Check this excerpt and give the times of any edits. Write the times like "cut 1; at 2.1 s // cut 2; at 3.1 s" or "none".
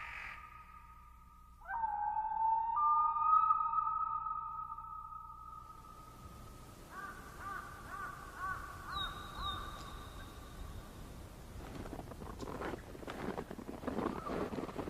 cut 1; at 8.2 s